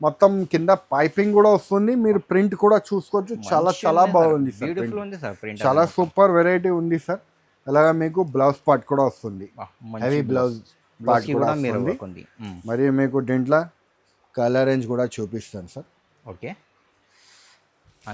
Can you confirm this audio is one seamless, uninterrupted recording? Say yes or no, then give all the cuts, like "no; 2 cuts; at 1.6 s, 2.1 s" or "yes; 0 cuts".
yes; 0 cuts